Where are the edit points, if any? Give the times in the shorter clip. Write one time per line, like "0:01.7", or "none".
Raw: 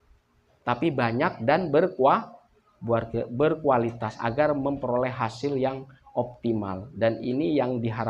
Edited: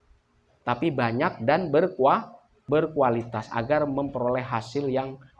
0:02.6